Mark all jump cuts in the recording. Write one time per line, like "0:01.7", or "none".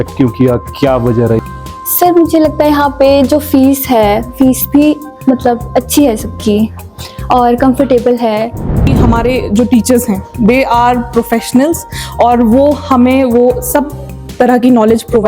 0:01.4
0:08.9